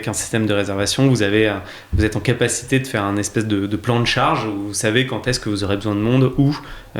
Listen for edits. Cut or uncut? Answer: uncut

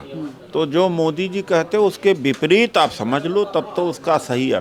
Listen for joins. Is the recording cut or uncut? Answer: uncut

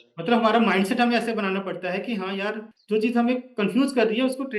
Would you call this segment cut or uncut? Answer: cut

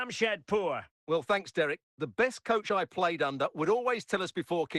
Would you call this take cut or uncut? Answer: cut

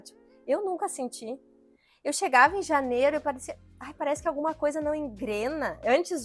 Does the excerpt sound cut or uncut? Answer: uncut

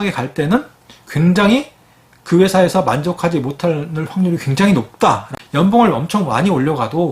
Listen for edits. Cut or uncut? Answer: cut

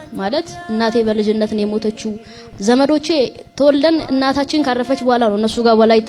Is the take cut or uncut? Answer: uncut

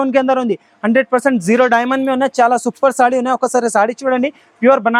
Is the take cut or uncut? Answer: uncut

